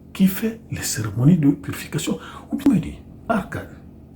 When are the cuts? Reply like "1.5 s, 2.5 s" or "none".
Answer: 2.6 s